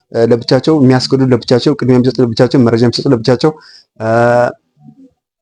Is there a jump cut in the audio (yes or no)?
no